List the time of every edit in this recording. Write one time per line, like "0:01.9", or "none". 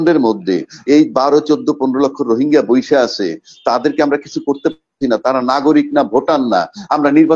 none